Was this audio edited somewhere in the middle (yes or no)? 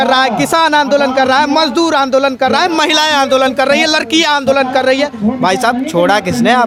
no